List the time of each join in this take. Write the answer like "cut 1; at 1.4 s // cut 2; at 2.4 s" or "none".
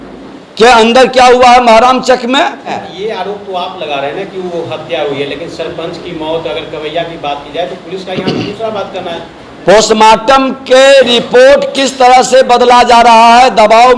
cut 1; at 2.9 s